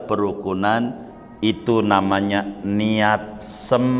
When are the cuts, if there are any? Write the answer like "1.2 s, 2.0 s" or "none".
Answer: none